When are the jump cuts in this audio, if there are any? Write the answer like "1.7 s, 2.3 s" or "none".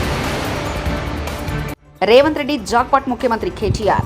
1.8 s